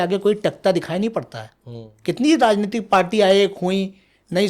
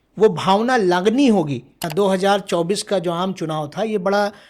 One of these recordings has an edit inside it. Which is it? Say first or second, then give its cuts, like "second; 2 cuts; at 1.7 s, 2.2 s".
second; 1 cut; at 1.8 s